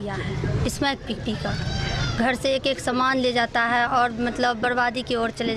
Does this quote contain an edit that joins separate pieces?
no; 0 cuts

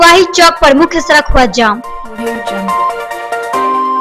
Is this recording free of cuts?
yes; 0 cuts

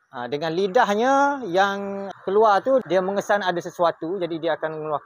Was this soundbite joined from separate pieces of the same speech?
yes; 2 cuts; at 1.6 s, 2.8 s

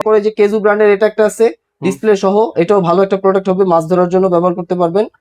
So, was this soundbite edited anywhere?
no; 0 cuts

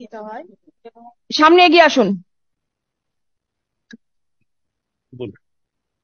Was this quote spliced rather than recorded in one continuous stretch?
no; 0 cuts

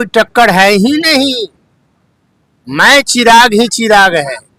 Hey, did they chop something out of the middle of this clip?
no; 0 cuts

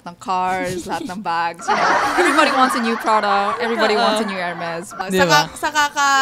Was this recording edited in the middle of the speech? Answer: yes; 1 cut; at 4.9 s

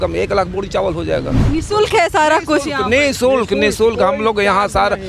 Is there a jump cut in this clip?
no; 0 cuts

